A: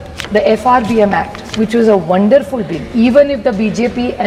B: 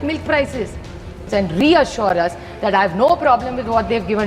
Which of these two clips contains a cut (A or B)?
B